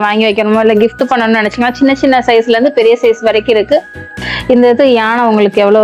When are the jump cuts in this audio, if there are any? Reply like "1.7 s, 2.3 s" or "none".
4.3 s